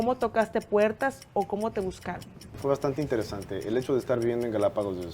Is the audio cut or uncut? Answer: cut